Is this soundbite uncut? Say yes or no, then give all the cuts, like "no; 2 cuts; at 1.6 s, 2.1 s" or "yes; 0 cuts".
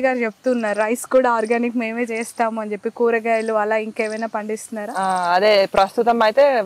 yes; 0 cuts